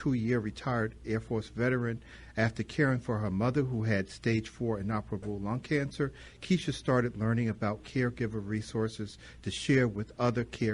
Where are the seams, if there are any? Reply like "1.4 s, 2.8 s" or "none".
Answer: 9.5 s